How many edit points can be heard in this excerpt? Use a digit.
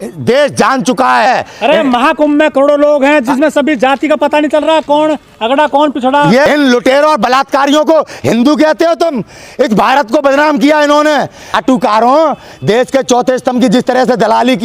3